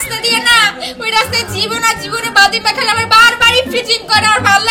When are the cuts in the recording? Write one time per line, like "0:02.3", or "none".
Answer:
none

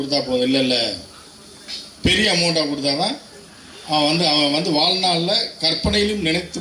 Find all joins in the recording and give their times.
none

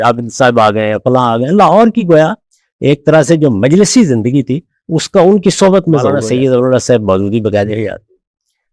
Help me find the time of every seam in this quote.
0:06.2

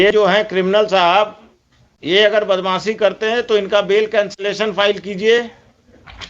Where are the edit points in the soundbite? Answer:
none

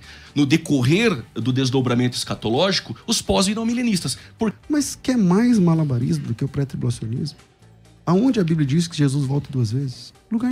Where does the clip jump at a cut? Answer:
0:04.5

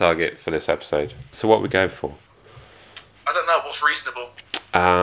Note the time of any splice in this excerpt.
0:01.3

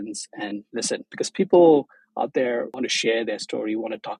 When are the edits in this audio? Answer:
0:01.1
0:02.7

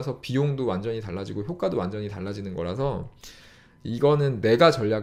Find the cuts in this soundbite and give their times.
none

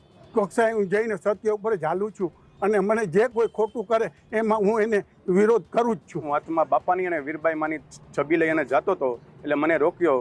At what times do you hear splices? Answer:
0:06.2

